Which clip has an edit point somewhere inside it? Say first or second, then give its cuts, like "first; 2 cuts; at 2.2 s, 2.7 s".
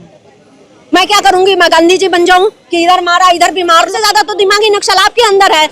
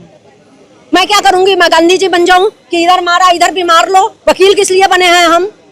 first; 1 cut; at 3.9 s